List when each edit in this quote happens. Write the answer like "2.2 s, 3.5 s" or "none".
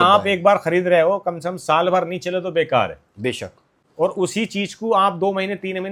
none